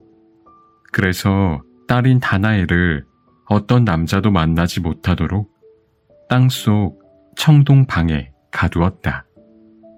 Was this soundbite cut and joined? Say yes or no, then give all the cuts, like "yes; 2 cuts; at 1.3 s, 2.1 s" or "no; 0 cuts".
no; 0 cuts